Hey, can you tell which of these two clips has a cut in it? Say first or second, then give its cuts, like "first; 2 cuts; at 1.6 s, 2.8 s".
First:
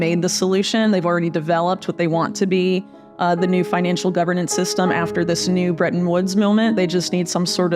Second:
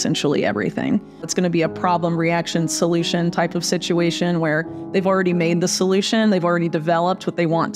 second; 1 cut; at 1.3 s